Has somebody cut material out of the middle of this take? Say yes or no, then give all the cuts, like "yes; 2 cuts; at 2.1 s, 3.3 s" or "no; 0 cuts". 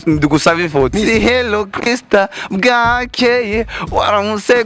yes; 1 cut; at 0.9 s